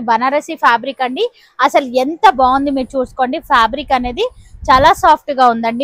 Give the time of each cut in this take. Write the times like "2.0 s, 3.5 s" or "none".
none

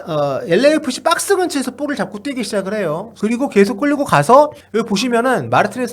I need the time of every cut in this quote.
3.1 s, 4.6 s

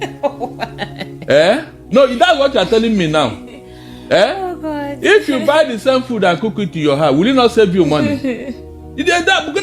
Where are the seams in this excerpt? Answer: none

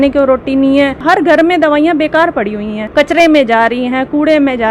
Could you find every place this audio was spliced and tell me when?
1.0 s, 2.7 s

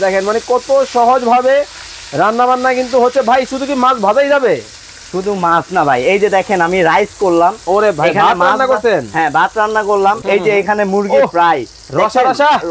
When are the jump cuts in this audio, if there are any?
10.2 s

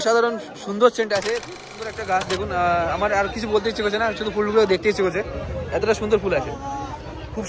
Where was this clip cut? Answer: 1.6 s

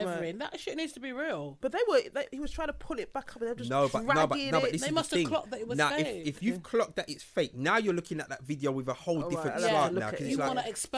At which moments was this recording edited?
none

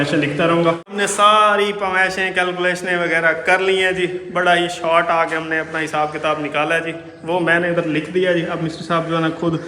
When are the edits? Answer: 0.9 s

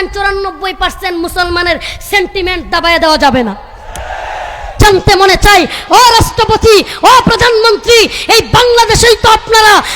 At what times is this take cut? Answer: 4.7 s

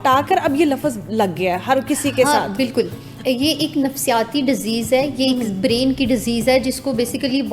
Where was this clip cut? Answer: none

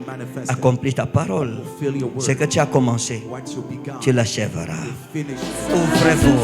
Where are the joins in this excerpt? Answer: 5.5 s

